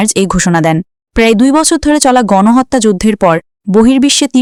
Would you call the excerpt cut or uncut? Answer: uncut